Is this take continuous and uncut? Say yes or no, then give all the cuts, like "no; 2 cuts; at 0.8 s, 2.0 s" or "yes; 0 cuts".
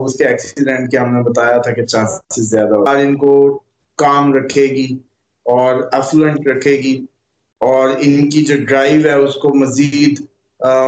no; 1 cut; at 2.9 s